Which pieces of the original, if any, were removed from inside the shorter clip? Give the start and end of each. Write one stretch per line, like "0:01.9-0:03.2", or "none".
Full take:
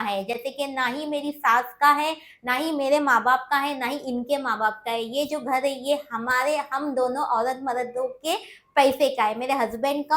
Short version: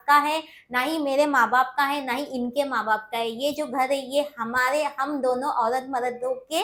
none